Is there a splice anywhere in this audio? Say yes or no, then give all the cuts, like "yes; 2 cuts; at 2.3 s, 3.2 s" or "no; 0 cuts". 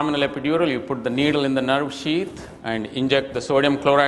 yes; 1 cut; at 2.0 s